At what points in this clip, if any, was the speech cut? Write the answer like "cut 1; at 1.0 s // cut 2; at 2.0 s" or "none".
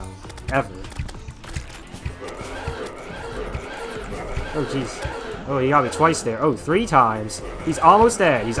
cut 1; at 1.8 s